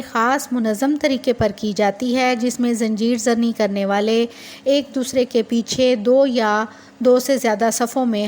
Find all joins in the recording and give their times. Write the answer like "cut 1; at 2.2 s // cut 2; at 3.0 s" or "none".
none